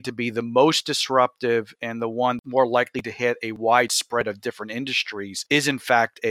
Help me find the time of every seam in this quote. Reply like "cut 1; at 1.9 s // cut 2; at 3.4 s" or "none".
cut 1; at 2.4 s // cut 2; at 5.4 s